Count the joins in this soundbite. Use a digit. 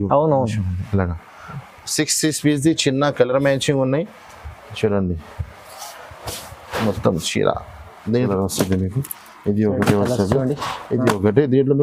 1